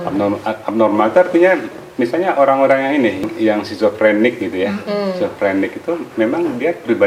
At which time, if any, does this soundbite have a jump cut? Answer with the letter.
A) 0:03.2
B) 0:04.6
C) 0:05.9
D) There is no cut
A